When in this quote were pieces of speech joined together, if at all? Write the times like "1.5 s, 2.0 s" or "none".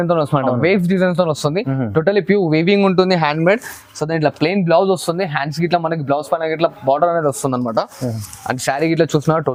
none

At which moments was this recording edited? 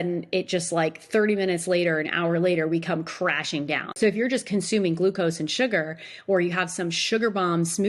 3.9 s

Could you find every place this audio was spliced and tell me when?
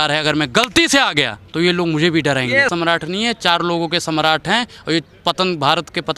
1.4 s, 2.7 s

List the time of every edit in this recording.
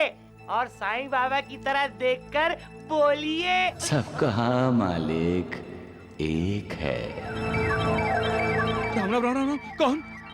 8.9 s

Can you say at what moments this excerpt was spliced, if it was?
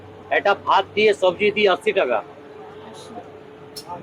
none

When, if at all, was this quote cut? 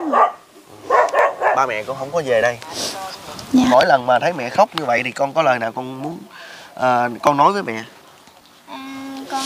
3.7 s

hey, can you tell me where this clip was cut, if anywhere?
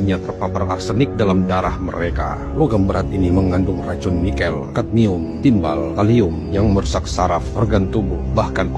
none

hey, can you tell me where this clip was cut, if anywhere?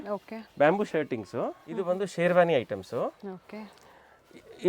1.7 s

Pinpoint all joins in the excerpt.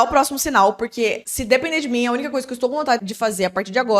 1.3 s, 3.0 s

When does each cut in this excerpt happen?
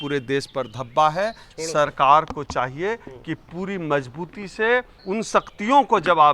5.0 s

